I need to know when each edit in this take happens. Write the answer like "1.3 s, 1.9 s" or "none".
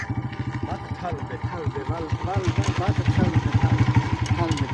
none